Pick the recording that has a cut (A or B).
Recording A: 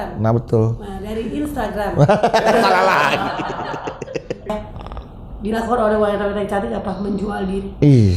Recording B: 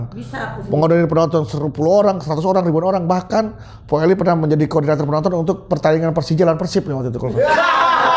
A